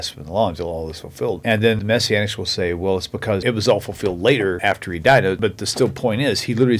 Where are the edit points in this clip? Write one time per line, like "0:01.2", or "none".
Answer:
0:01.6
0:04.6
0:05.4